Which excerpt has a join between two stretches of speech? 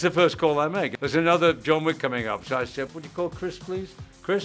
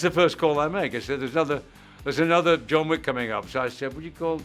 first; 2 cuts; at 1.0 s, 3.0 s

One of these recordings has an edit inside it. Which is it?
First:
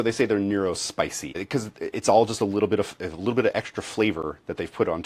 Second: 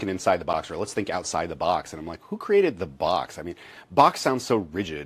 first; 1 cut; at 1.4 s

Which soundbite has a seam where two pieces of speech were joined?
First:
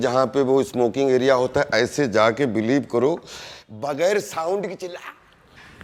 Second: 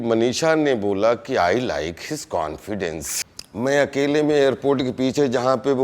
second; 1 cut; at 3.1 s

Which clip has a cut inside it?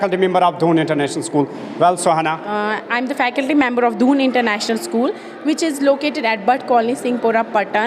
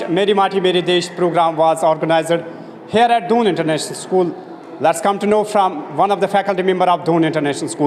first; 1 cut; at 2.5 s

